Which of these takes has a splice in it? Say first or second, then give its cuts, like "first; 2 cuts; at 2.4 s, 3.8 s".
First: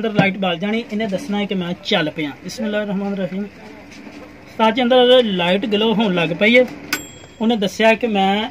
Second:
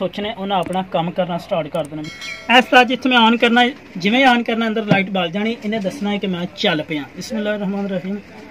second; 1 cut; at 2.1 s